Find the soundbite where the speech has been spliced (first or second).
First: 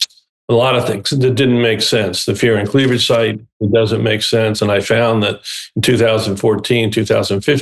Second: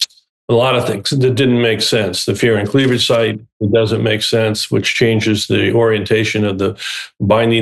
first